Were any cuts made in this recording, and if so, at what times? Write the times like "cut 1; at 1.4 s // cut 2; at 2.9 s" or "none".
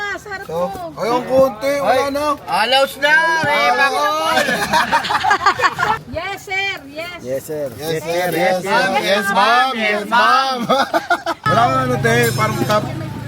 cut 1; at 6.0 s // cut 2; at 11.4 s